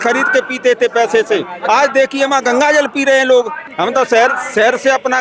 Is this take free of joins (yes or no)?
no